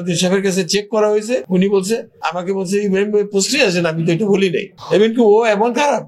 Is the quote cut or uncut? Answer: cut